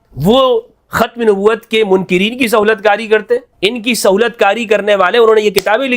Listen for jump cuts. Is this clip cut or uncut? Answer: cut